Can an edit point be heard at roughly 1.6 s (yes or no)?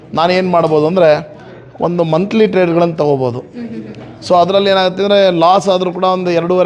no